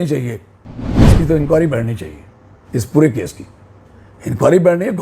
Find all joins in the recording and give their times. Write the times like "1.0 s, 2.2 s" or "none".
0.9 s